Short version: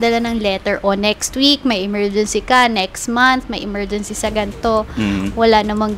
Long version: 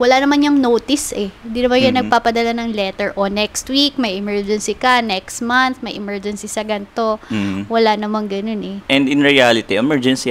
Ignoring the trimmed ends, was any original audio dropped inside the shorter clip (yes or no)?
no